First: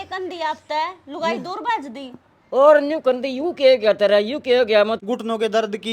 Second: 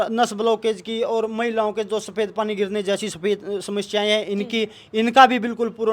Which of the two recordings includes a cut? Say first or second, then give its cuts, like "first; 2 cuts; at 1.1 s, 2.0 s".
first; 1 cut; at 4.9 s